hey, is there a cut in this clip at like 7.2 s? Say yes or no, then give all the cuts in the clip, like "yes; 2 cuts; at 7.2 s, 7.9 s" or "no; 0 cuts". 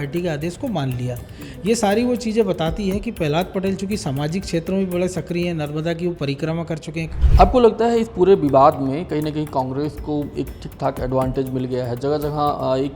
yes; 1 cut; at 7.2 s